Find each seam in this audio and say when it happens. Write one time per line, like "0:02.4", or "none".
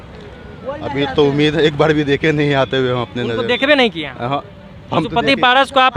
none